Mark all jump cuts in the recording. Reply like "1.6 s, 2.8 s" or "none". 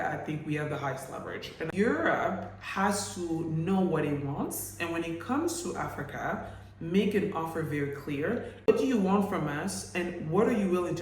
1.7 s, 8.7 s